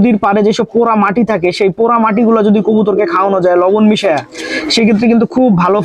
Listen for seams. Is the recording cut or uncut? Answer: uncut